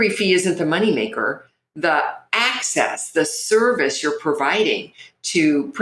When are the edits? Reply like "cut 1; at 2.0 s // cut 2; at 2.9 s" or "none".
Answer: none